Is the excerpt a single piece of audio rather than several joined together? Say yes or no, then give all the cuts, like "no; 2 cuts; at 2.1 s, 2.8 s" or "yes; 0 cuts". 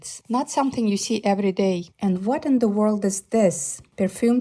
no; 1 cut; at 1.9 s